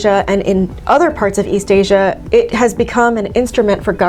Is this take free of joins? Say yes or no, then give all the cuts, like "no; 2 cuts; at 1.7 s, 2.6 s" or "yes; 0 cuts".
yes; 0 cuts